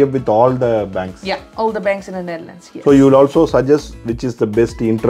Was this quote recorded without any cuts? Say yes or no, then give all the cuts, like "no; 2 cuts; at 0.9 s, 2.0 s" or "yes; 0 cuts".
yes; 0 cuts